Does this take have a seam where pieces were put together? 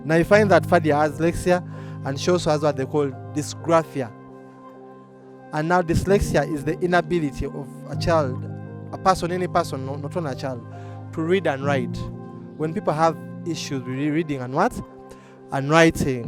yes; 1 cut; at 1.2 s

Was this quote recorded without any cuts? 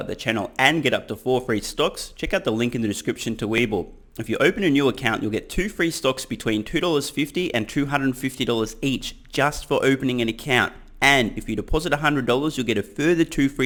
yes; 0 cuts

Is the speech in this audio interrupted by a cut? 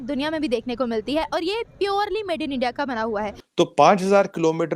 yes; 1 cut; at 3.4 s

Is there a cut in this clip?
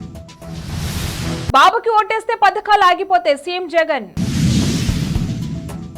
yes; 1 cut; at 1.4 s

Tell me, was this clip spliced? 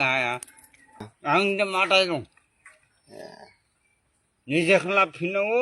yes; 1 cut; at 1.1 s

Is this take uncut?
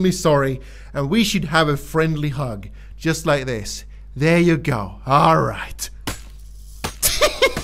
yes; 0 cuts

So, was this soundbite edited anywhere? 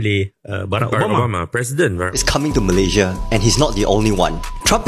yes; 1 cut; at 2.2 s

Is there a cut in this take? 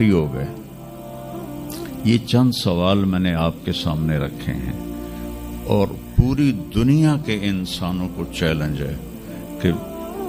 no; 0 cuts

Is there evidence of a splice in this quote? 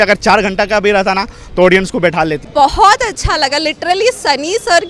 yes; 1 cut; at 2.4 s

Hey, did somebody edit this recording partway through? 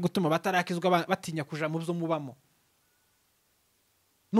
no; 0 cuts

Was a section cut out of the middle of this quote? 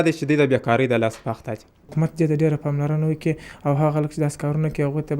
yes; 1 cut; at 1.9 s

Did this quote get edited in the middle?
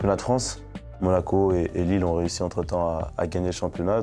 yes; 1 cut; at 0.9 s

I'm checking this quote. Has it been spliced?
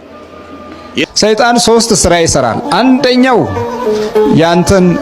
yes; 1 cut; at 1.1 s

